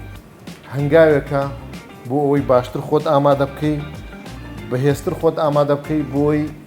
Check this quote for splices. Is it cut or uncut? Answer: uncut